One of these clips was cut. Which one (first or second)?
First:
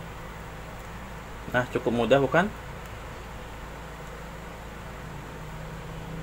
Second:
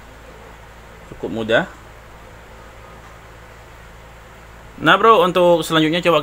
second